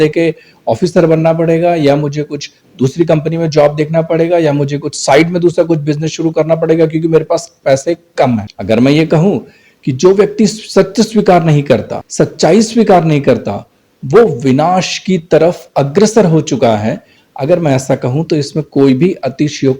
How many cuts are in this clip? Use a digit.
1